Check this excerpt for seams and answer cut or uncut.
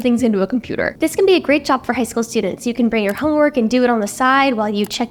uncut